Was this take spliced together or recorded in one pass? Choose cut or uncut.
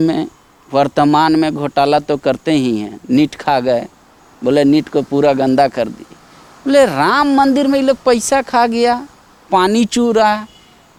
uncut